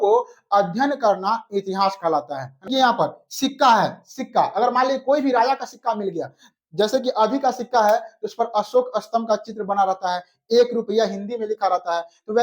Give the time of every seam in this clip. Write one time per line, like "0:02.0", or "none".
0:02.7